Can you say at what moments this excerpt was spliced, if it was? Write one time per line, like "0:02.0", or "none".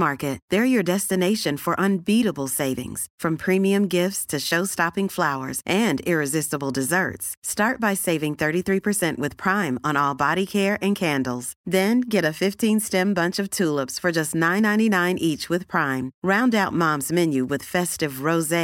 none